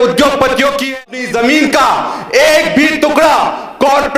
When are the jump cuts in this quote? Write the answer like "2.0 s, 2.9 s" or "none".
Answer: 1.1 s